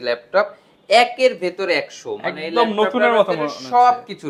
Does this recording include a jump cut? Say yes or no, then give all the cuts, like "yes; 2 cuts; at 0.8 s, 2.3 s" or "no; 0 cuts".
no; 0 cuts